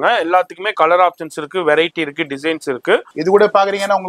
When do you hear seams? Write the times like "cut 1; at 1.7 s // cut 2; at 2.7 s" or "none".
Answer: cut 1; at 3.1 s